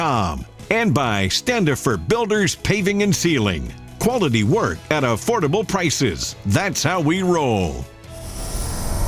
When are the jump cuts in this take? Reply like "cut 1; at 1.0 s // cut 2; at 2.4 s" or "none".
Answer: cut 1; at 8.0 s